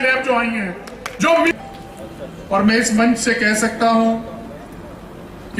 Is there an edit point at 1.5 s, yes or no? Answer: yes